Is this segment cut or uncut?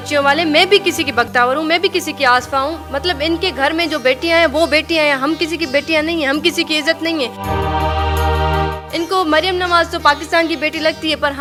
uncut